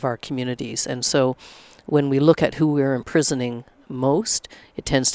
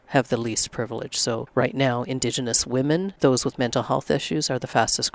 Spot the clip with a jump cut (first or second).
second